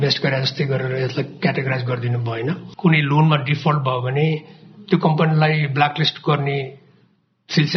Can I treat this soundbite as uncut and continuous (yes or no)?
no